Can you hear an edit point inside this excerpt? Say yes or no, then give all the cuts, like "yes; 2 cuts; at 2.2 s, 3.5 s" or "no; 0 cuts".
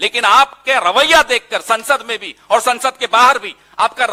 no; 0 cuts